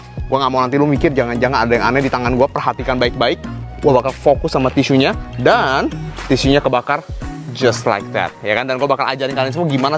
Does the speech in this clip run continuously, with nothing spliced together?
yes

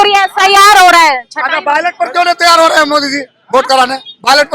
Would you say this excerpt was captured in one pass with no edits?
yes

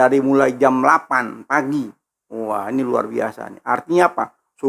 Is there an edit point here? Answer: no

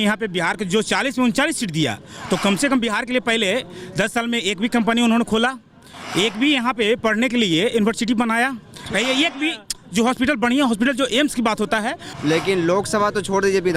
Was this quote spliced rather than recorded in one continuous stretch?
yes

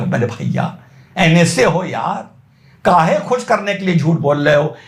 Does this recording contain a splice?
no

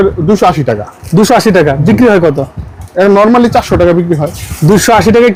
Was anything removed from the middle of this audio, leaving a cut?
no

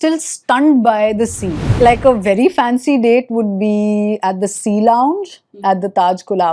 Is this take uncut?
no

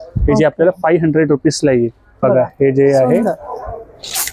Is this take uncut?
no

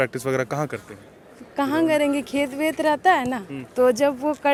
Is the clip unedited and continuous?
yes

